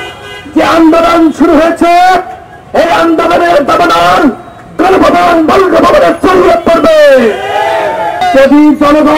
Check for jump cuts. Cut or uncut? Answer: cut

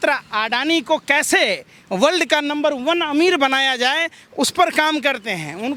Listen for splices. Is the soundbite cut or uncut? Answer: uncut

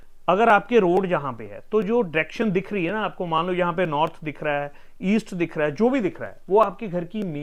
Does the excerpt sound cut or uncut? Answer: uncut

